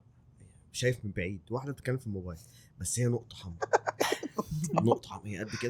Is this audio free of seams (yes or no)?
yes